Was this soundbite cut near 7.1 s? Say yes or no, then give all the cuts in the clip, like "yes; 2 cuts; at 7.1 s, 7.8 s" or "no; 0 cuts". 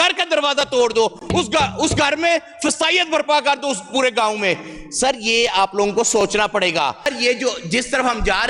yes; 1 cut; at 7.1 s